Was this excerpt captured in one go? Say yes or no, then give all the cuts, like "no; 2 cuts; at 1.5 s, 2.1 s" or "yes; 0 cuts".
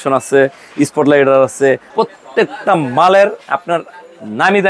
no; 1 cut; at 1.9 s